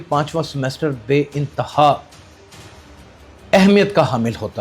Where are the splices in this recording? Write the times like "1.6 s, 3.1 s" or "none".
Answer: 2.1 s, 3.5 s